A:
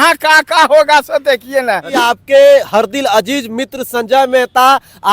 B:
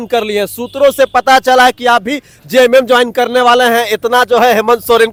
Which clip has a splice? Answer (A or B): A